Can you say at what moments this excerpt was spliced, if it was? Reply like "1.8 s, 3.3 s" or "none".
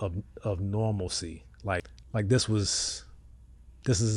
2.0 s